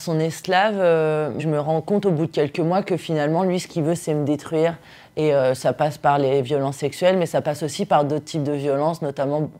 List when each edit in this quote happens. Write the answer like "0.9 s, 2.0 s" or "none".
none